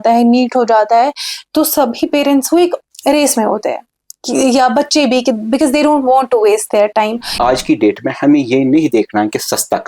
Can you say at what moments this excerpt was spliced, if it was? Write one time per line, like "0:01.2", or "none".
0:07.4